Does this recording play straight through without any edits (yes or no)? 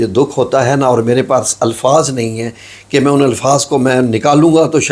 yes